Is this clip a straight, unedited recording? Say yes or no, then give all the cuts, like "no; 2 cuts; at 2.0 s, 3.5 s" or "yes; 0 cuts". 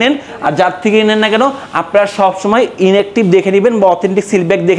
yes; 0 cuts